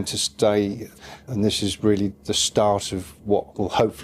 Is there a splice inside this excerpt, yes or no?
yes